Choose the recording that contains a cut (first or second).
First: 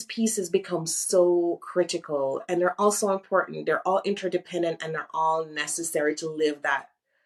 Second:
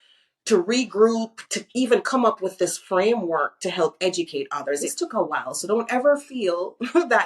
second